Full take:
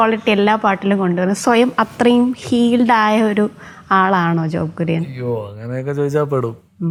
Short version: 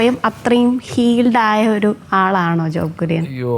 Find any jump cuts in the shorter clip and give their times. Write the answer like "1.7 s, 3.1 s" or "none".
2.0 s